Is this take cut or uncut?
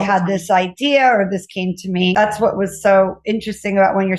cut